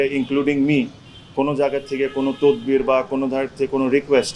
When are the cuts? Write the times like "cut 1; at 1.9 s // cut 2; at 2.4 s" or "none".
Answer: none